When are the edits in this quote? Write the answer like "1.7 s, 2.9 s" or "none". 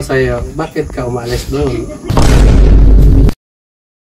1.9 s